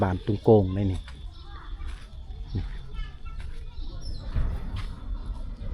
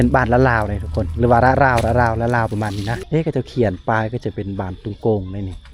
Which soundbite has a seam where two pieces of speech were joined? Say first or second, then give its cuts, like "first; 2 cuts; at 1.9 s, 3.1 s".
second; 1 cut; at 3.0 s